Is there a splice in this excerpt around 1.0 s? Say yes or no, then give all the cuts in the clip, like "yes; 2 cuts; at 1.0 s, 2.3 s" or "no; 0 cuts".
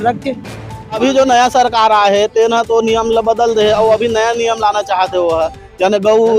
yes; 1 cut; at 1.0 s